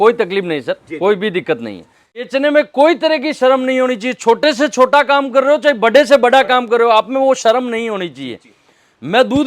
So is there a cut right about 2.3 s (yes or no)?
yes